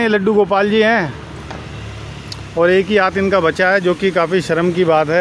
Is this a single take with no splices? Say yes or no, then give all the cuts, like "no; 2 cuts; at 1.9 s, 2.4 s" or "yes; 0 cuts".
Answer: yes; 0 cuts